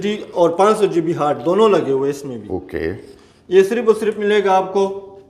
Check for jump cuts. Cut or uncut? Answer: uncut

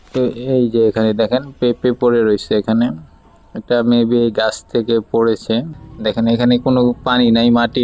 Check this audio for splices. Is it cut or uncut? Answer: cut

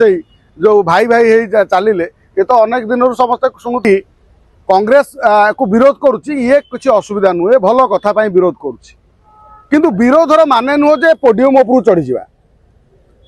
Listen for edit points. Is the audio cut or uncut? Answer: cut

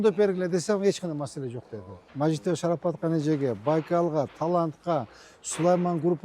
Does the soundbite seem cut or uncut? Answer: cut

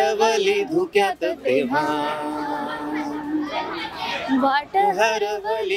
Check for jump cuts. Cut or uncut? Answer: uncut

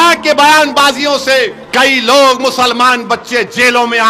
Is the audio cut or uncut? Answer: cut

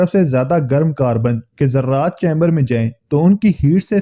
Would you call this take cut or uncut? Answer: uncut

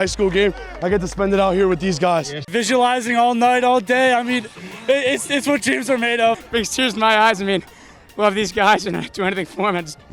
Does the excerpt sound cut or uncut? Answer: cut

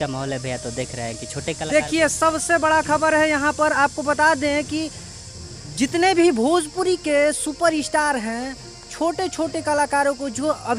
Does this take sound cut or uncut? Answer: uncut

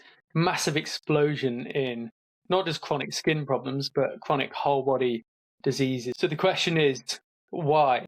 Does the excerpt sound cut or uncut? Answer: cut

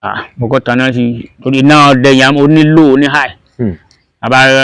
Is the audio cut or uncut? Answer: uncut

